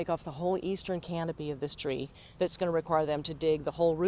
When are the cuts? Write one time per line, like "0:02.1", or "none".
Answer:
0:02.2